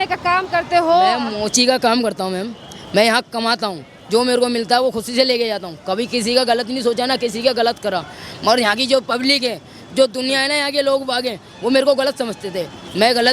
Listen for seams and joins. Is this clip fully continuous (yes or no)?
yes